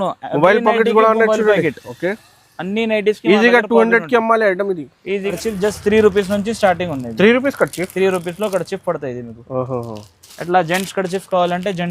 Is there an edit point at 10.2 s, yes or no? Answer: no